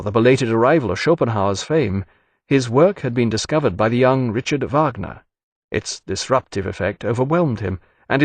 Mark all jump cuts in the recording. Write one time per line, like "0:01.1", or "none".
0:04.7